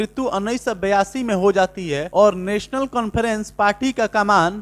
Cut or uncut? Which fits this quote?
cut